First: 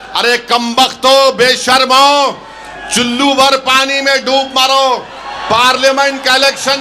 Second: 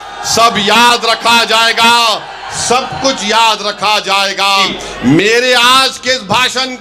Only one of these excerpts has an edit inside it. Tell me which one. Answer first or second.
second